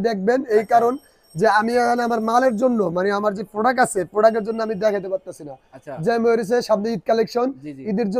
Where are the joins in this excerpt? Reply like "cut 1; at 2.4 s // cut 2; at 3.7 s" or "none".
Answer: none